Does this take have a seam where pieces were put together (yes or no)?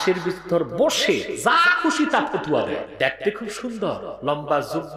yes